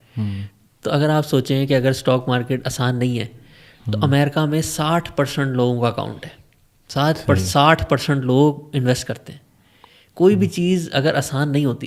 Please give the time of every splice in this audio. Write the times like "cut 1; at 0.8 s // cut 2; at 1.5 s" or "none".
none